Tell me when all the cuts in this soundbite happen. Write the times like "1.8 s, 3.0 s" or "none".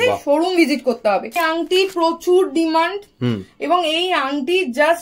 1.4 s